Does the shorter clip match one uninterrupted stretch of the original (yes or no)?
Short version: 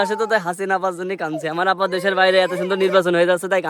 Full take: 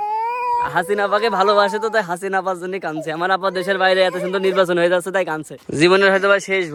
yes